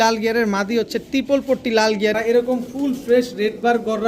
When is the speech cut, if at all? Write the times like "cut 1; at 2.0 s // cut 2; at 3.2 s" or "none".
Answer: cut 1; at 2.1 s